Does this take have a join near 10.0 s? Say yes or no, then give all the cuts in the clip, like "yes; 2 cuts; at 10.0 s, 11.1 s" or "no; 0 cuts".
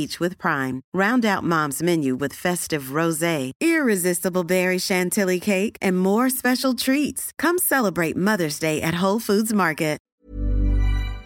yes; 1 cut; at 10.0 s